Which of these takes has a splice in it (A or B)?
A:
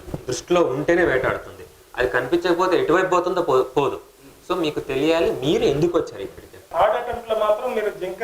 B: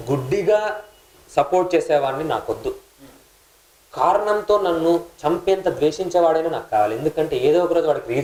A